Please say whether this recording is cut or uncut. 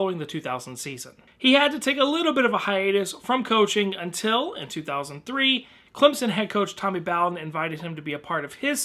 cut